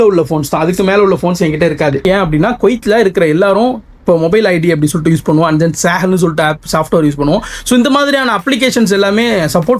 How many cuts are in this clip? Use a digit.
1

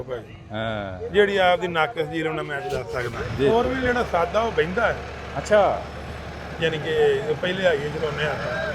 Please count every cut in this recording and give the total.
1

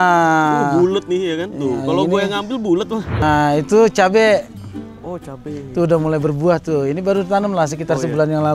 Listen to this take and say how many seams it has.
1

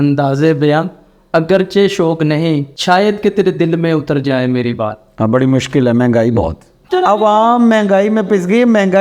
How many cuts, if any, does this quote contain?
2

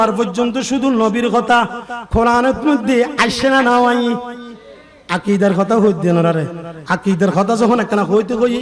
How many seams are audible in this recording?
0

